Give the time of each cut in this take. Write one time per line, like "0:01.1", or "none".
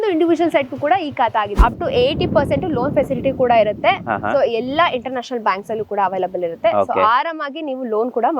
0:01.6